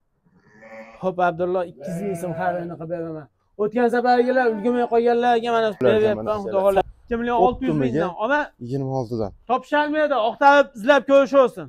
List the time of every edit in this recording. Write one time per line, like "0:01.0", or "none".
0:06.8